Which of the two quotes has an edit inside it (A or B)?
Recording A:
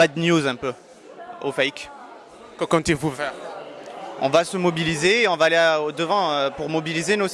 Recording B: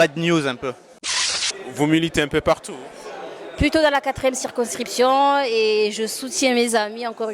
B